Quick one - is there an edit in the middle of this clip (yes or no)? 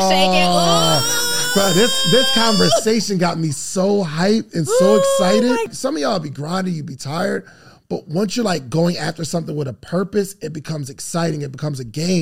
yes